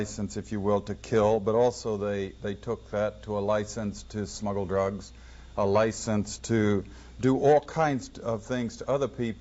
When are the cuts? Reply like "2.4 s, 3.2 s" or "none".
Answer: 7.3 s